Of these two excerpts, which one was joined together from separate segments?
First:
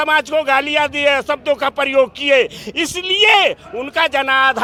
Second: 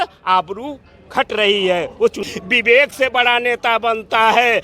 second; 1 cut; at 2.2 s

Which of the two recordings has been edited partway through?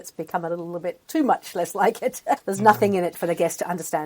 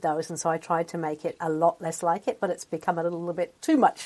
first; 1 cut; at 2.5 s

